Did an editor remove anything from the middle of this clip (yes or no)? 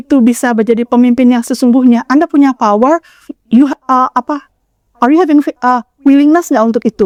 no